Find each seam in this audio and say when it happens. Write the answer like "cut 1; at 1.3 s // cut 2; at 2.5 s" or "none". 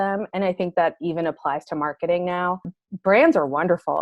cut 1; at 2.8 s